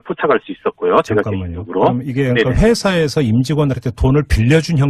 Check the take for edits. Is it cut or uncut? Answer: uncut